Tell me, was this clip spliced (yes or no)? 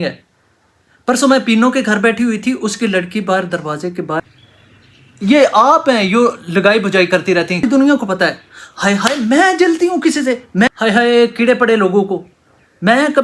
yes